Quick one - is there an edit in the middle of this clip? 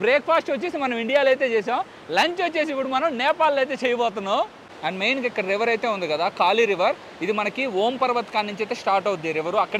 no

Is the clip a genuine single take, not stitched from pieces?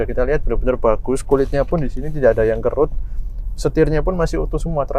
yes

